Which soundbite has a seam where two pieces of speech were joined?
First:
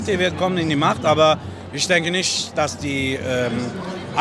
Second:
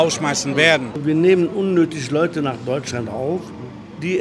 second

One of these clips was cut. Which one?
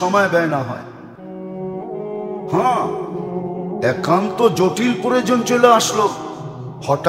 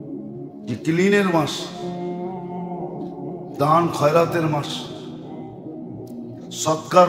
second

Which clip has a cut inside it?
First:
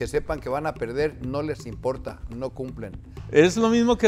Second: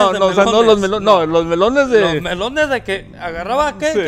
first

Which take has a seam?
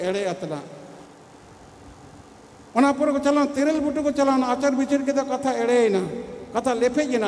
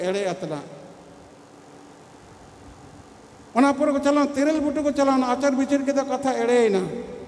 first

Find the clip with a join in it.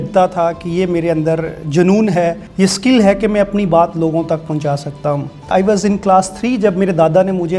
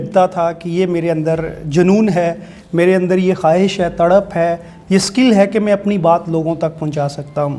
first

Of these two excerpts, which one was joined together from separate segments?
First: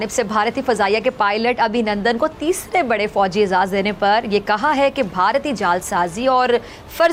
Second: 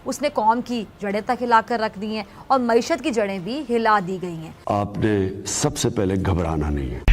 second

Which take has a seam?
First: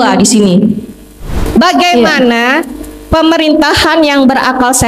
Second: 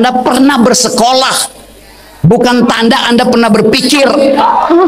first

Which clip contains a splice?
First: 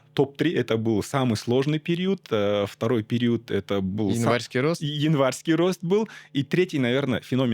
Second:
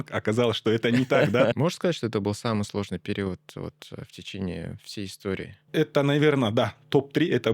second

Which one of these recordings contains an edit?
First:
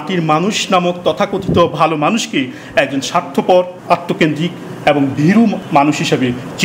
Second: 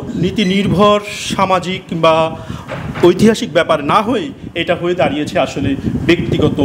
first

